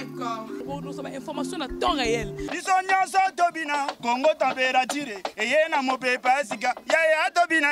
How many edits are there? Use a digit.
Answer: 0